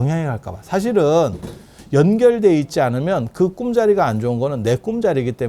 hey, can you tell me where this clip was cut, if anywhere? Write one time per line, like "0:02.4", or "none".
none

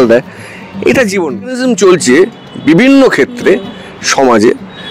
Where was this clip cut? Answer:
0:01.6

